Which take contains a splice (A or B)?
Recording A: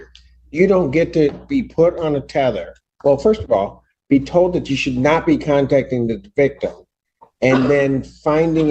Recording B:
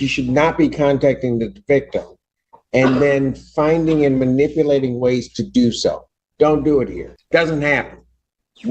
B